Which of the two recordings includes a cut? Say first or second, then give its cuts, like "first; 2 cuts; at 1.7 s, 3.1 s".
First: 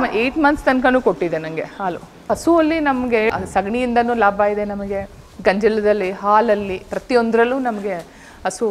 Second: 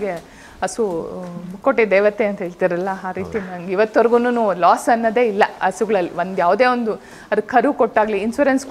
first; 2 cuts; at 2.2 s, 3.3 s